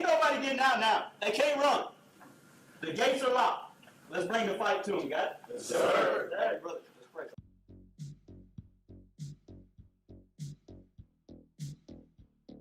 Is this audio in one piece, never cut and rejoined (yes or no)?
no